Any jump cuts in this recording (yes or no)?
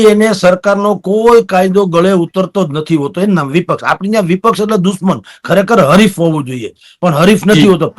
no